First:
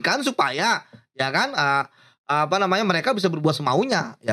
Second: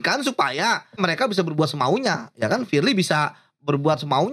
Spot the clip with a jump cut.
second; 1 cut; at 1.0 s

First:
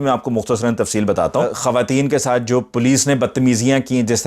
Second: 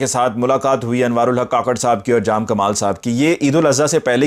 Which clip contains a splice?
first; 1 cut; at 1.5 s

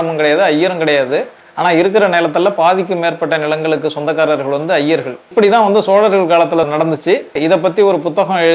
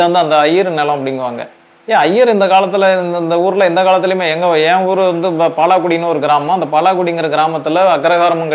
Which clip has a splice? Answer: first; 2 cuts; at 5.3 s, 7.0 s

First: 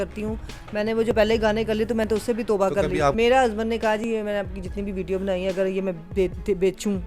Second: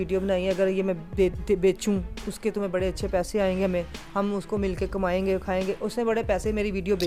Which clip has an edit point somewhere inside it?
first; 1 cut; at 3.1 s

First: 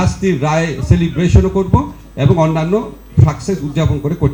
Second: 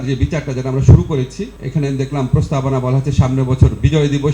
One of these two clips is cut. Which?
second; 1 cut; at 1.5 s

